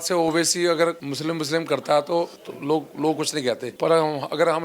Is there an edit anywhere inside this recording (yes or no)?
yes